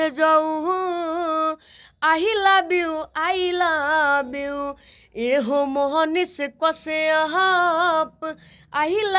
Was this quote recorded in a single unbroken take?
yes; 0 cuts

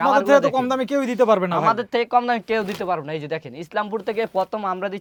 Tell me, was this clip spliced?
no; 0 cuts

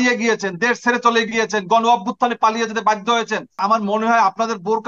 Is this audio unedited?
no; 1 cut; at 3.6 s

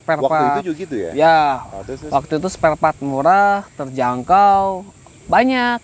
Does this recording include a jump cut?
no; 0 cuts

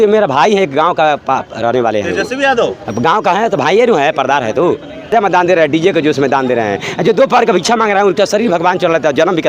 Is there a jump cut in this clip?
yes; 1 cut; at 5.1 s

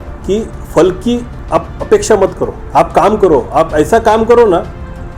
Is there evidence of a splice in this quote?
yes; 2 cuts; at 1.3 s, 2.5 s

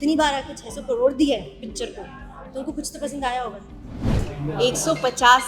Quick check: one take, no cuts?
no; 1 cut; at 4.1 s

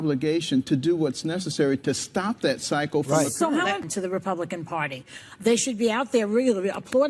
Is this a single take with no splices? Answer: no; 1 cut; at 3.9 s

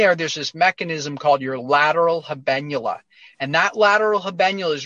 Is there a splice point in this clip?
no; 0 cuts

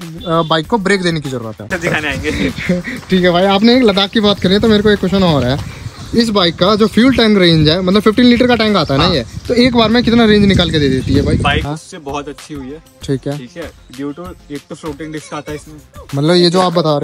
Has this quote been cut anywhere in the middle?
yes; 2 cuts; at 1.7 s, 11.6 s

